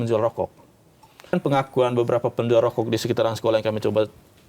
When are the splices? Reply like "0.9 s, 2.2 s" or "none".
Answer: 1.3 s

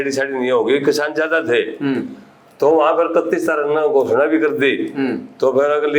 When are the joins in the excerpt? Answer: none

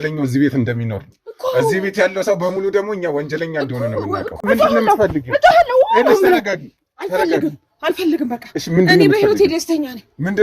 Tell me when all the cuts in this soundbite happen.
4.4 s

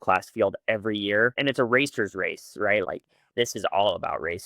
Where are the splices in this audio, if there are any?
1.4 s, 2.8 s

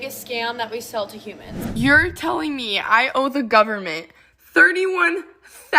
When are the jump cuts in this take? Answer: 1.5 s

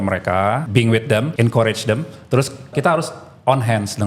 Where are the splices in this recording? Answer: 1.0 s, 2.7 s

